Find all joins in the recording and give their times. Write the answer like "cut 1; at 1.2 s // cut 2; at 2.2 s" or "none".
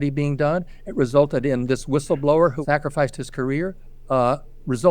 cut 1; at 2.6 s